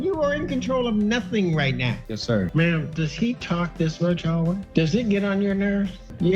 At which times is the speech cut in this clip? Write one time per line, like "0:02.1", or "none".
0:02.4
0:04.6